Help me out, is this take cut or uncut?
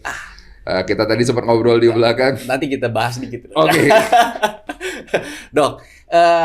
uncut